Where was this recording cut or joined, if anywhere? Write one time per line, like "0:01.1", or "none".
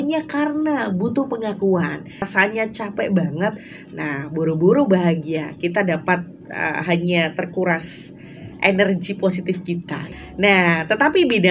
0:02.3
0:10.0